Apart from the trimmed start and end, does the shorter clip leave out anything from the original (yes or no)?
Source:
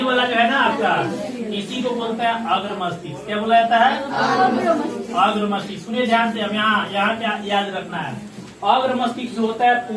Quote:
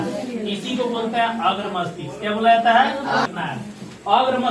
yes